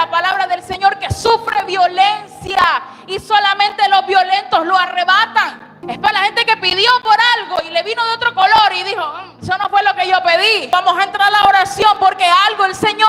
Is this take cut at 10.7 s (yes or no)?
yes